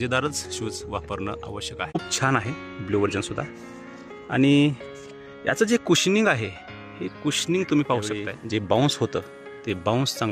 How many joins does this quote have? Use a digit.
2